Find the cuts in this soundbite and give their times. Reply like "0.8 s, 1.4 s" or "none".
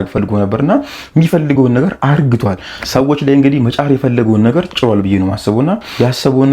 none